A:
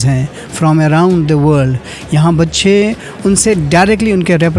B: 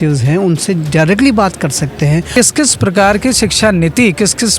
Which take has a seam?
B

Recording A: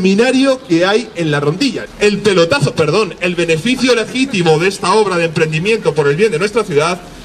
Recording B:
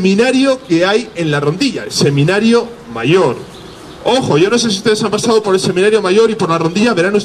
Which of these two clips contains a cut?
A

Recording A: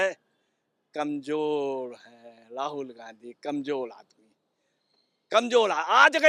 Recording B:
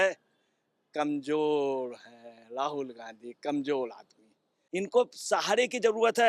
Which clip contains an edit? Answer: B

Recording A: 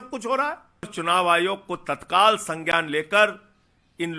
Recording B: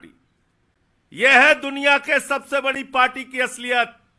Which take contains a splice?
A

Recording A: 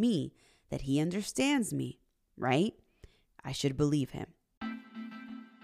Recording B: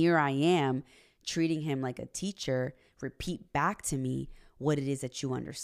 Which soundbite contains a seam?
A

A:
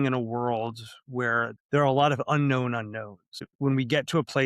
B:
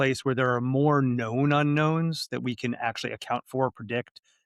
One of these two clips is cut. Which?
A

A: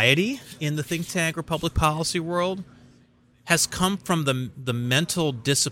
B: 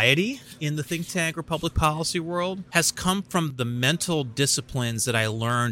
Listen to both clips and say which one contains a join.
B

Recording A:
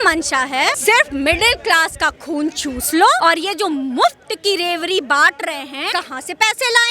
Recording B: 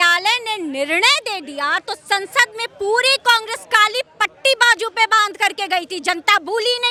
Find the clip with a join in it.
A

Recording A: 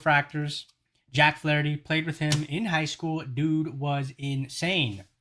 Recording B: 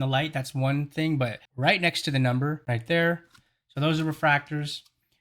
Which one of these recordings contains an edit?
B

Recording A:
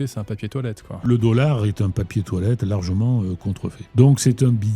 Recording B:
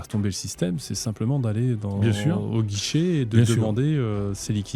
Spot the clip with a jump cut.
A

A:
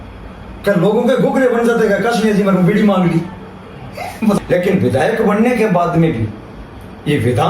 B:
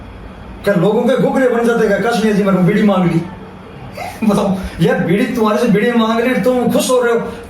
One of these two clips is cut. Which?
A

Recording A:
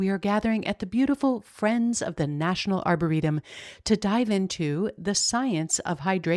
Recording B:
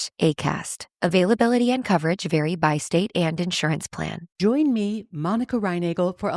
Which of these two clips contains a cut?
B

